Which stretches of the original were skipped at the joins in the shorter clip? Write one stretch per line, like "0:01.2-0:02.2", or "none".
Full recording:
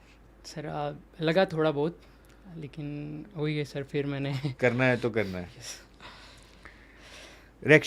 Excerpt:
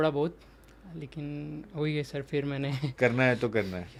none